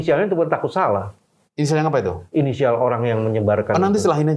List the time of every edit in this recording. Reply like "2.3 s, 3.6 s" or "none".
none